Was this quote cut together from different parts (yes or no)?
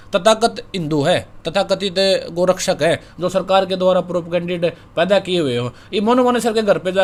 no